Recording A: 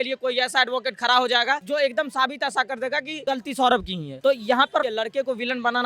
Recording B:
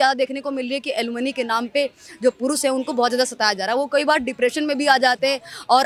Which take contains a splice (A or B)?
A